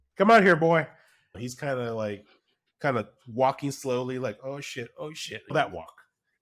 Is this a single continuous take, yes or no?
no